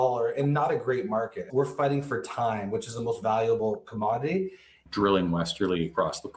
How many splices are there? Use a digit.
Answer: 2